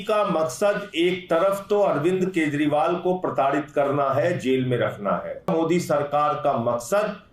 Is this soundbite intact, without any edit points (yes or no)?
no